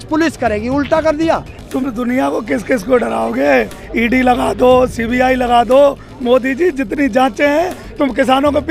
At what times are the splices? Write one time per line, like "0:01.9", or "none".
0:01.6